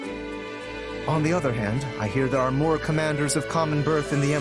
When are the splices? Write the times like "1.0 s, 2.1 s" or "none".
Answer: 1.1 s